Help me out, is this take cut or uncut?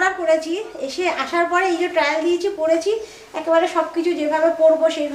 uncut